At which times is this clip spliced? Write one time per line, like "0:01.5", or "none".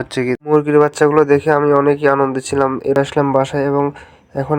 0:02.9